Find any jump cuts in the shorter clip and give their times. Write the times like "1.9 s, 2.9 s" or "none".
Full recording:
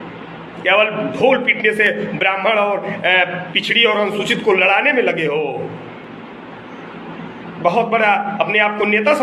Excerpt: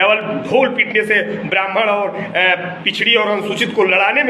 none